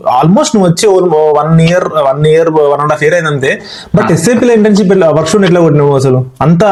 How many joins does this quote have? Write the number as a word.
zero